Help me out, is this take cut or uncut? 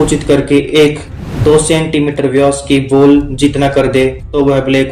uncut